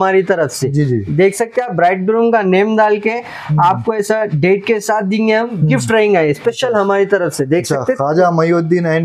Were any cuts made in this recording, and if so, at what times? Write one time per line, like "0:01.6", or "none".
none